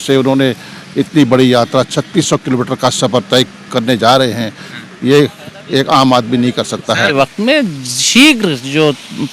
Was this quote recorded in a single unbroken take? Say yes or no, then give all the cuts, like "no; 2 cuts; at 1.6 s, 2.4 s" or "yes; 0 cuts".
no; 1 cut; at 7.1 s